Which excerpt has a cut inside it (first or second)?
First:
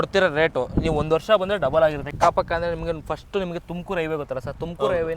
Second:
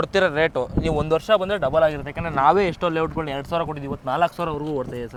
first